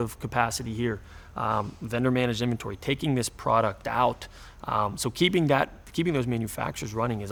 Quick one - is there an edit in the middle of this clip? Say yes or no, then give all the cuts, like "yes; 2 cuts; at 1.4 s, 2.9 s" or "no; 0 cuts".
no; 0 cuts